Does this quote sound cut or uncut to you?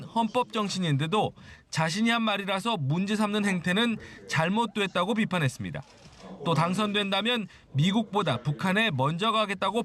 uncut